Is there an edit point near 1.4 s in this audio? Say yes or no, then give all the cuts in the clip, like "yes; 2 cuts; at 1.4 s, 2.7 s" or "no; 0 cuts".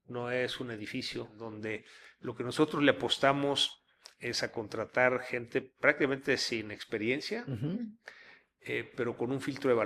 yes; 1 cut; at 1.4 s